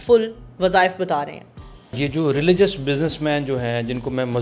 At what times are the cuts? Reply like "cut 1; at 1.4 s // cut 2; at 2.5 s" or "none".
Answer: cut 1; at 2.0 s